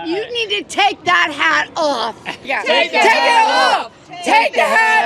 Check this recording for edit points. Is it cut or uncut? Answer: cut